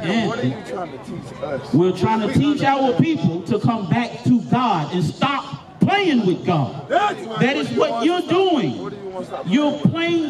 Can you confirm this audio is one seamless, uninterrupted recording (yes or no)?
yes